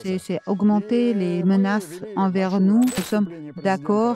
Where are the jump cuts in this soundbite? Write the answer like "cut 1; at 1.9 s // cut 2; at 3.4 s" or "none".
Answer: cut 1; at 3.0 s